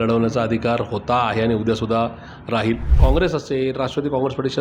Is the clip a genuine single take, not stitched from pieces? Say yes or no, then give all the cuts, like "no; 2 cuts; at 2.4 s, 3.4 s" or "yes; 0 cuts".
no; 1 cut; at 2.9 s